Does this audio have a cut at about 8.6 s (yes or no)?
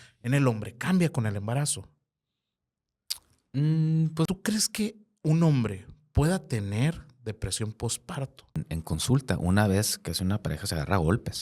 yes